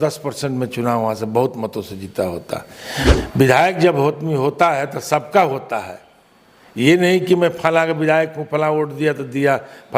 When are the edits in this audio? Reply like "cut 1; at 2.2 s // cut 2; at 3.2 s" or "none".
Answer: cut 1; at 3.2 s